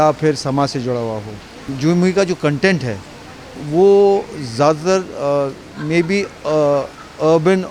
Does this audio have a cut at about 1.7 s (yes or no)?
yes